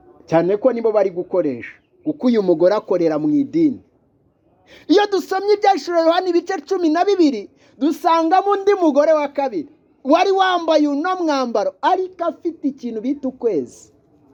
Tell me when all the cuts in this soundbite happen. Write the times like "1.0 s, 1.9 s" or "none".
none